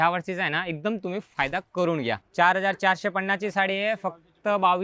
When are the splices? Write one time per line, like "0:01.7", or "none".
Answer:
0:02.2